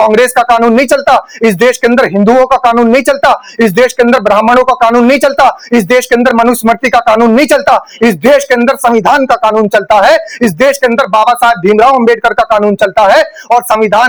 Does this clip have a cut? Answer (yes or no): no